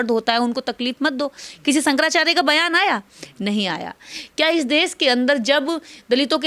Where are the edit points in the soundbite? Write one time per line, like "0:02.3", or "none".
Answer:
none